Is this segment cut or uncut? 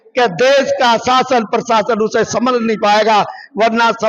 uncut